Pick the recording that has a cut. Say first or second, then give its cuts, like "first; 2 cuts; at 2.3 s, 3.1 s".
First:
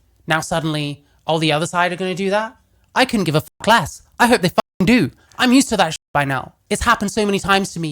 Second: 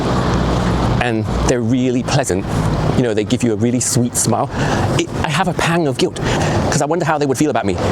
first; 1 cut; at 6.5 s